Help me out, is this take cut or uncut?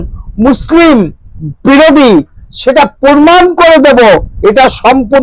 uncut